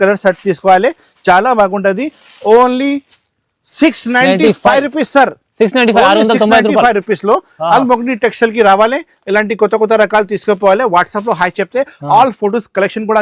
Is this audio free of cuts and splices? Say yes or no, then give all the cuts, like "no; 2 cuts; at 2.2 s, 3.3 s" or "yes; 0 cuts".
yes; 0 cuts